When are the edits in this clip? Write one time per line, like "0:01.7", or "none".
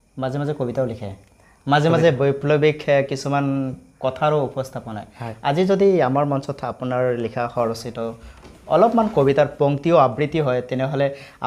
none

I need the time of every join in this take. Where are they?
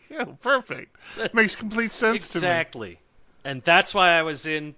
0:03.6

